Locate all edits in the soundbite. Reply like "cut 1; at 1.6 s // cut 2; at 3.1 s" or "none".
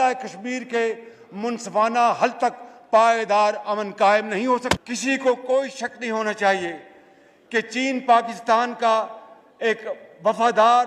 cut 1; at 4.8 s